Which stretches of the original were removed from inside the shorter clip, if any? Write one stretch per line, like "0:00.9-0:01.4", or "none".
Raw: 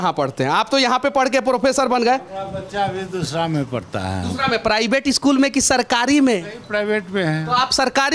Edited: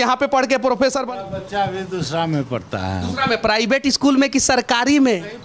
0:01.9-0:02.3